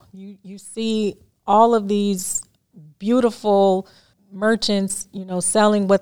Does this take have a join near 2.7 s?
no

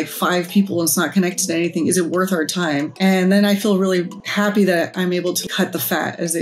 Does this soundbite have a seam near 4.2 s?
yes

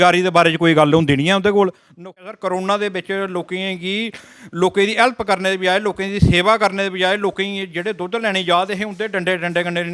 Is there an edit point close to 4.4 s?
no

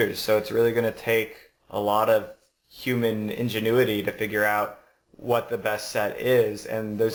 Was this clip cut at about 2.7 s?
no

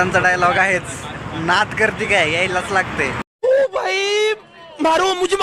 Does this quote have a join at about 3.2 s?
yes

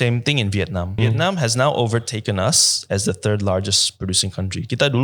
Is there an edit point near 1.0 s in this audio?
yes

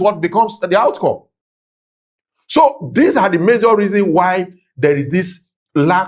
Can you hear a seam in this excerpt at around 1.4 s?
no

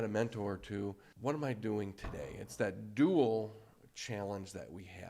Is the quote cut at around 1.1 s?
yes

